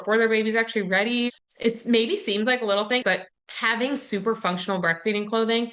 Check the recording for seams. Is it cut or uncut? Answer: cut